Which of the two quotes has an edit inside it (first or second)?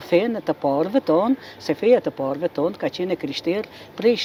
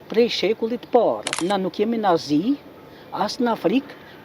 second